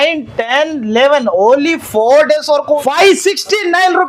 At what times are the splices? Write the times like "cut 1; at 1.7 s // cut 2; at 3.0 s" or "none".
cut 1; at 2.8 s